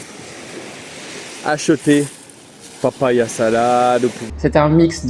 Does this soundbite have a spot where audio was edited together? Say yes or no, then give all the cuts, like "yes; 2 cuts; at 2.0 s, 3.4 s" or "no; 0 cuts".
yes; 1 cut; at 4.2 s